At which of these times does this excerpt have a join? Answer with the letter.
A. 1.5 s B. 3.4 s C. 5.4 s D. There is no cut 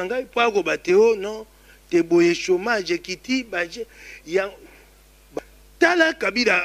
C